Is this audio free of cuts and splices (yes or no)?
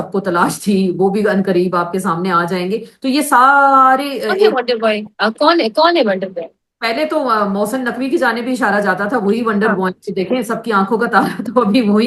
yes